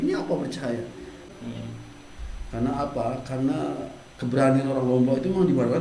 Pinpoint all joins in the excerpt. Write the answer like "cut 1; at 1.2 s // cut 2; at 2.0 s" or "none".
cut 1; at 1.2 s